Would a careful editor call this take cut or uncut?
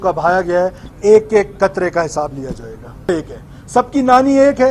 cut